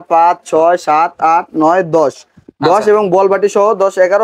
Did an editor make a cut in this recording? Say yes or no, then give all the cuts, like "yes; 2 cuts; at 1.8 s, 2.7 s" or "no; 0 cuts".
no; 0 cuts